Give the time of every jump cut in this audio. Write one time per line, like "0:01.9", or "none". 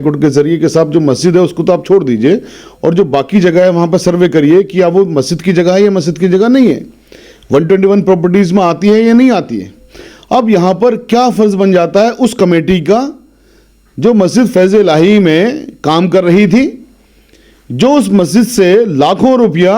none

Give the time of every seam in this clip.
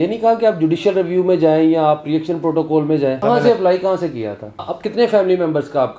0:03.2
0:04.8

